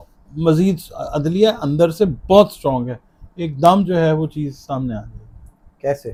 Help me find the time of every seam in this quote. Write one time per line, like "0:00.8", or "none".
none